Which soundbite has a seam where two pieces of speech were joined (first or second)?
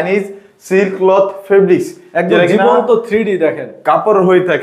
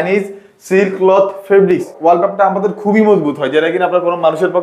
second